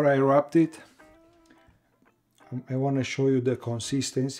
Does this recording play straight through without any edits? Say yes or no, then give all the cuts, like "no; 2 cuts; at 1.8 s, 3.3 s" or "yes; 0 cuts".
yes; 0 cuts